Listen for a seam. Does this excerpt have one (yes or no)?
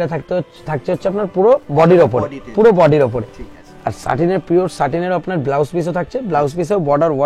no